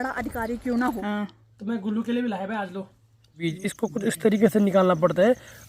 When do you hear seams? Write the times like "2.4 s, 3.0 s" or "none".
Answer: 1.0 s, 3.4 s